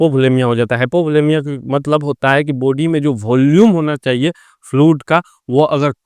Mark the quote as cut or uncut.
uncut